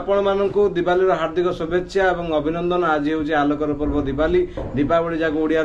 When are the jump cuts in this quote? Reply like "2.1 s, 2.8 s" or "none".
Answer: none